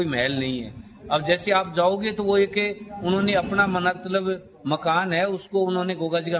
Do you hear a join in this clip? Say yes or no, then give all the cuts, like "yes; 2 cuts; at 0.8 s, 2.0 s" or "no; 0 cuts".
no; 0 cuts